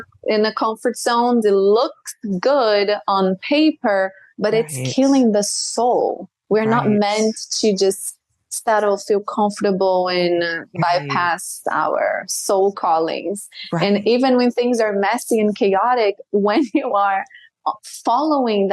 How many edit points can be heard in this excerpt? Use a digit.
1